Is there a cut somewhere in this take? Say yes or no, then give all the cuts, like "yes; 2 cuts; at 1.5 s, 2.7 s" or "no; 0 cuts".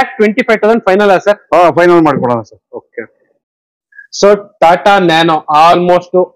no; 0 cuts